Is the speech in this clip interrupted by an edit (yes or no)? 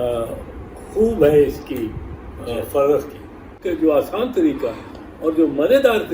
yes